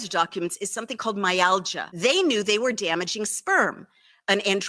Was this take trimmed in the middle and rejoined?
yes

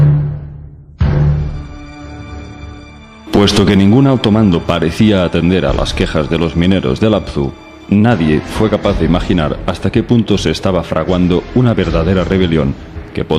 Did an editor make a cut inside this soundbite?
yes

